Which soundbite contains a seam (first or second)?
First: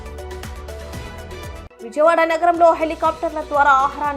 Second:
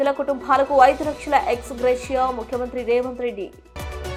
first